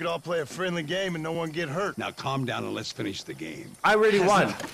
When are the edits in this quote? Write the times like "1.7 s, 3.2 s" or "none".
1.9 s